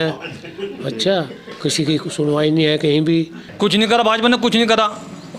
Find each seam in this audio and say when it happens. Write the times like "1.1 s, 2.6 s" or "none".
3.4 s